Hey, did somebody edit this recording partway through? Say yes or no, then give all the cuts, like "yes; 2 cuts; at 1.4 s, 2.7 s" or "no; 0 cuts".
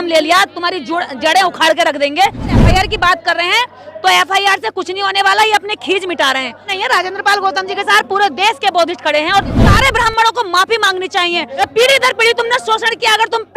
yes; 4 cuts; at 2.6 s, 6.7 s, 9.6 s, 11.5 s